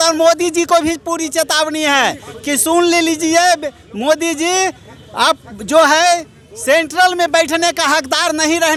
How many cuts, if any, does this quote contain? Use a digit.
0